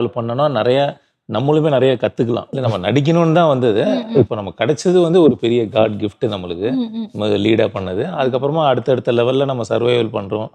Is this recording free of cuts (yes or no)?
no